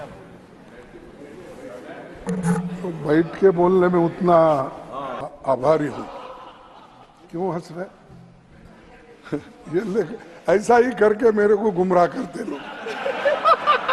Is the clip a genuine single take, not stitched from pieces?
no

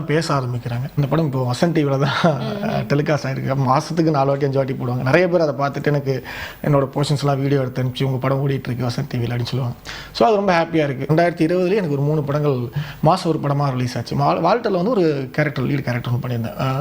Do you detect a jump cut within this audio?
yes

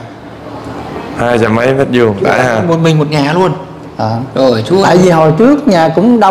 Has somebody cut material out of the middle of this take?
no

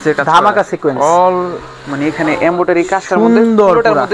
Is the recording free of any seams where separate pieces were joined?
yes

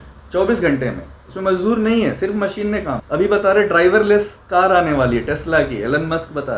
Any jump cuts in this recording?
yes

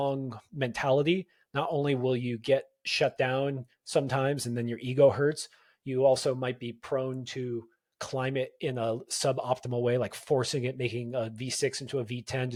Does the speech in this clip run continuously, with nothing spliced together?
yes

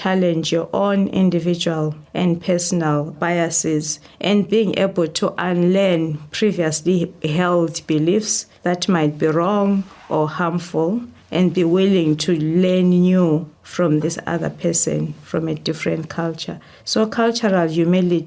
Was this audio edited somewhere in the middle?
no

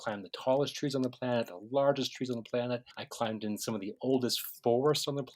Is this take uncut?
no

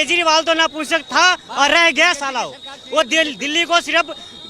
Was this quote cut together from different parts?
no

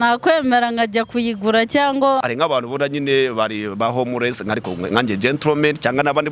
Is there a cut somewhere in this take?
yes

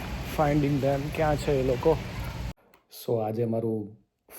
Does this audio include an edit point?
yes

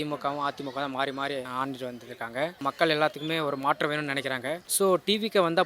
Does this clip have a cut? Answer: yes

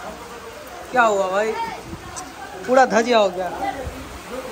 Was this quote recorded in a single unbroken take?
yes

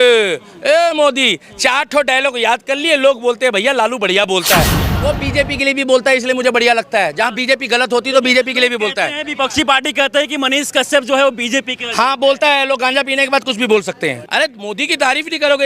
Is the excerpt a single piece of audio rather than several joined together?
no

